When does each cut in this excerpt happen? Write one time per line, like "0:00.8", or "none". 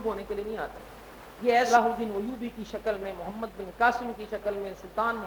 0:01.7